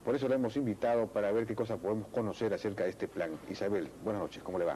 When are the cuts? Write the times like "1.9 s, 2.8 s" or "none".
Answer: 1.1 s

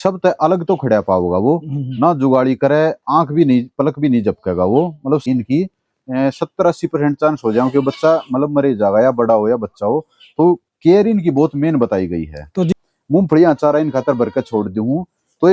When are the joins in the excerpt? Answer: 5.2 s, 12.7 s

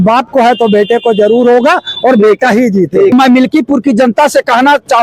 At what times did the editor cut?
3.1 s

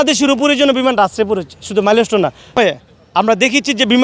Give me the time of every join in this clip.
2.6 s

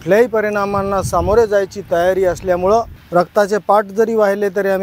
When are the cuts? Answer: 3.0 s

